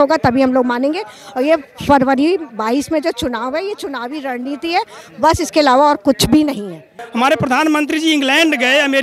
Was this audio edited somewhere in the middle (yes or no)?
yes